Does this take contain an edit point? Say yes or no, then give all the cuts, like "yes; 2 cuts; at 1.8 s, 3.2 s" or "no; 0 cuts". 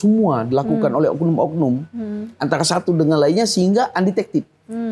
no; 0 cuts